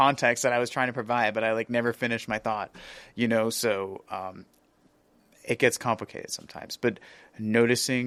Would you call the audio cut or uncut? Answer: uncut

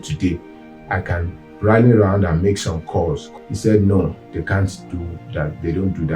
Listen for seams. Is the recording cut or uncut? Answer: cut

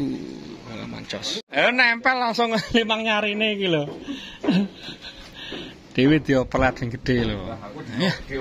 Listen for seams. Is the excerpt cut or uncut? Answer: uncut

